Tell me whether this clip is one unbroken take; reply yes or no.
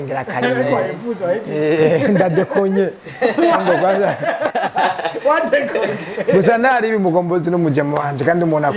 yes